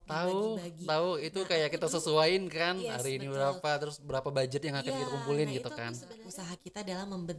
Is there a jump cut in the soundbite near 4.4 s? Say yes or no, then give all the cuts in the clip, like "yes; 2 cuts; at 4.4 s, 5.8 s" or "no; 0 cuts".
no; 1 cut; at 6.3 s